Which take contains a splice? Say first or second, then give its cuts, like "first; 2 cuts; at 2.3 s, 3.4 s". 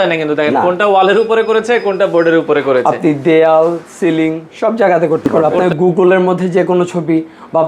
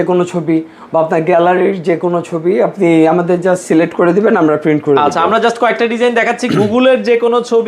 first; 1 cut; at 5.6 s